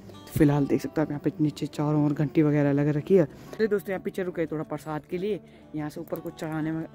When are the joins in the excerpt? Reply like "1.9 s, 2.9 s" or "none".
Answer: 3.4 s